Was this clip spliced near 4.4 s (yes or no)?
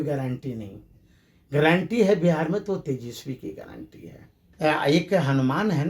yes